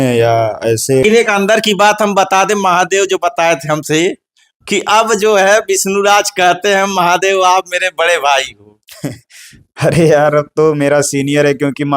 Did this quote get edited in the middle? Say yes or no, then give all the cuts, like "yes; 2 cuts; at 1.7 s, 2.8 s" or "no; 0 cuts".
yes; 1 cut; at 1.0 s